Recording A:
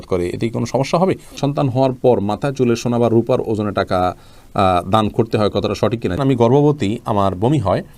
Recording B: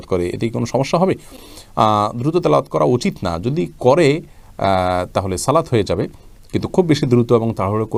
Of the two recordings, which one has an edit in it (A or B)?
A